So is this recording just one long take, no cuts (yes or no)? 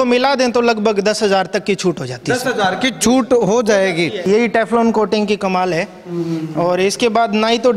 no